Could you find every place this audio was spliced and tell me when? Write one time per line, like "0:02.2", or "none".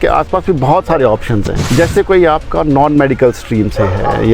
0:01.6